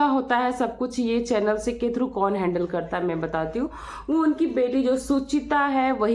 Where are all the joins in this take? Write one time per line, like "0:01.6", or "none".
none